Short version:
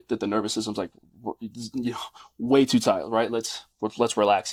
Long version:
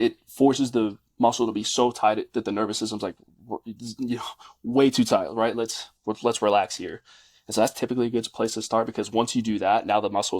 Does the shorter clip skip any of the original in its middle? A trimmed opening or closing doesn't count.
no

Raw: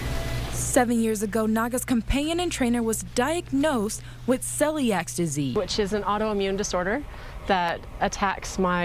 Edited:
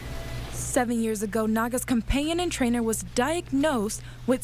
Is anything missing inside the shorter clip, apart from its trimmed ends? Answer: no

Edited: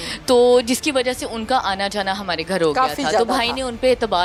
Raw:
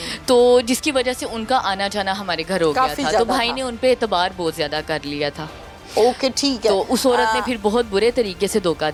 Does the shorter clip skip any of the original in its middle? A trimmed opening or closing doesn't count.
no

